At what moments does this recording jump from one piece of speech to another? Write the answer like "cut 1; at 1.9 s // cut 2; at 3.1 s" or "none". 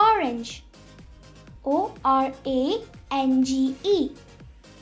none